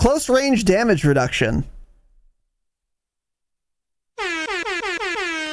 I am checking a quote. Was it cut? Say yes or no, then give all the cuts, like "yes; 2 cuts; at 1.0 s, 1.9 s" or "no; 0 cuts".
no; 0 cuts